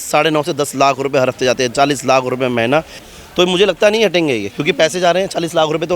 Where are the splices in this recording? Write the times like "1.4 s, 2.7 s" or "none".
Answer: 3.0 s